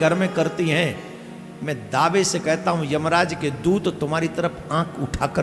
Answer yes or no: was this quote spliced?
no